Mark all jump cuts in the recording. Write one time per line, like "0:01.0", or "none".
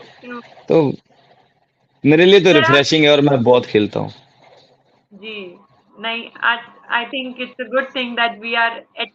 none